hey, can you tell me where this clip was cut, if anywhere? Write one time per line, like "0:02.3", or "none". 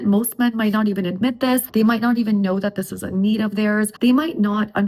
0:01.7
0:03.9